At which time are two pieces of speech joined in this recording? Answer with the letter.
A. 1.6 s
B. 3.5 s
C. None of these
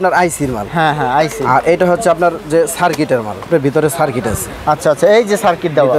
B